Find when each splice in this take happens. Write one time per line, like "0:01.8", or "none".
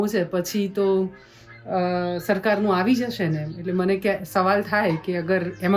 none